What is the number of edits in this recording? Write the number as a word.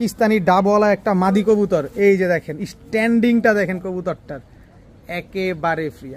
zero